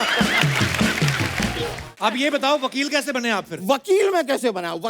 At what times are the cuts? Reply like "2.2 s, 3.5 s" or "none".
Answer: 1.6 s